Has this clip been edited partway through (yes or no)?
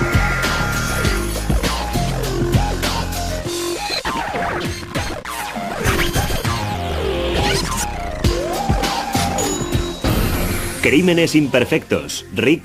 yes